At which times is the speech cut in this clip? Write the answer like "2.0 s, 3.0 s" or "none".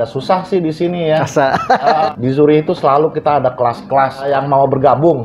2.1 s, 4.3 s

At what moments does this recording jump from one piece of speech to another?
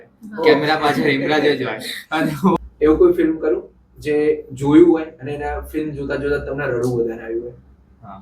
2.6 s

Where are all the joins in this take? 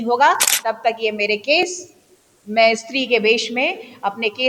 none

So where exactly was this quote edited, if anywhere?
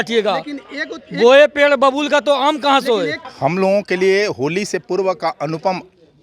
3.2 s

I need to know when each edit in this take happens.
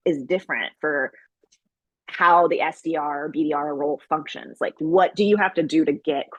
none

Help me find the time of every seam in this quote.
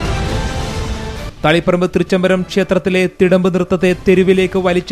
1.1 s

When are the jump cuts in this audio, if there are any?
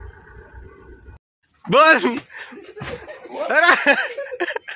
1.3 s

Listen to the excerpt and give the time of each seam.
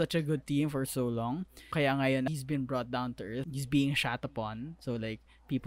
1.6 s, 2.3 s, 3.5 s

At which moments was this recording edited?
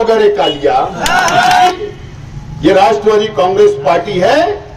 1.7 s

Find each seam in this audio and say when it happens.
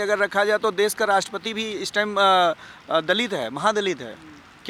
none

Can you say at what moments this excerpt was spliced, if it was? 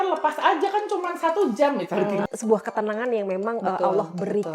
2.2 s

